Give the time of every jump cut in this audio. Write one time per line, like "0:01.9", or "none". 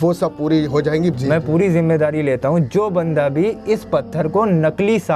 0:01.1